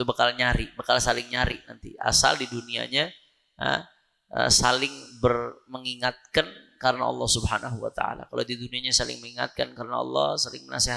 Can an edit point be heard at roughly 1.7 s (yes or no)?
no